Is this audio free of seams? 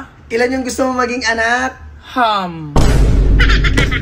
yes; 0 cuts

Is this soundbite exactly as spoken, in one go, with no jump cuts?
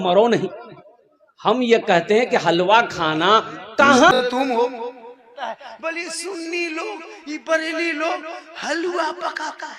no; 1 cut; at 4.1 s

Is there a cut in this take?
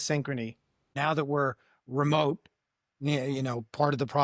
yes; 1 cut; at 0.9 s

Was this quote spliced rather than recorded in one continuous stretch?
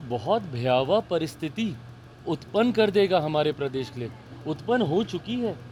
no; 0 cuts

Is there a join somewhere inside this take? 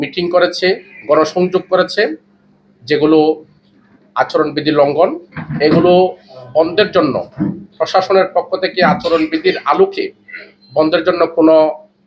no; 0 cuts

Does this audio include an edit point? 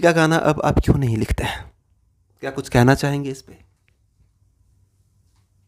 no; 0 cuts

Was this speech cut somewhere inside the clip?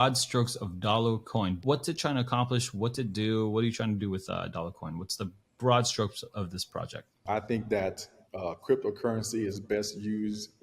yes; 2 cuts; at 1.6 s, 7.2 s

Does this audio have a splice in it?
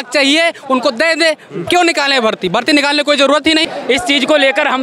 yes; 1 cut; at 3.7 s

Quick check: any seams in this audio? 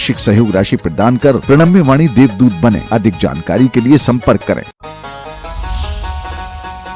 yes; 1 cut; at 4.7 s

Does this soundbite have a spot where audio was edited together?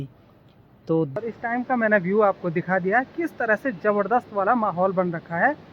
yes; 1 cut; at 1.2 s

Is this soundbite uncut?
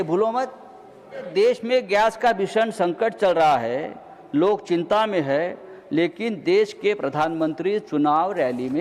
no; 1 cut; at 1.3 s

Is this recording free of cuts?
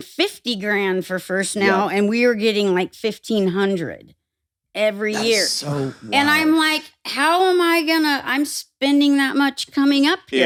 yes; 0 cuts

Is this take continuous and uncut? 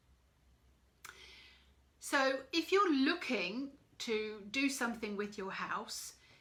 yes; 0 cuts

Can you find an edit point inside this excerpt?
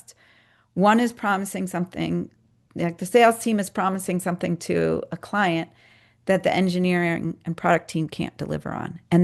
no; 0 cuts

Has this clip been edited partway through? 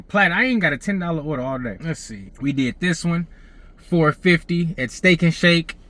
no; 0 cuts

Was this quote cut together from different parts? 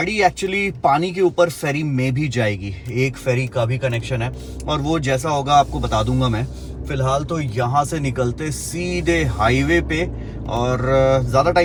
no; 0 cuts

